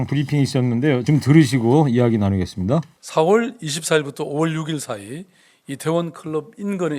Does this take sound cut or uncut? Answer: cut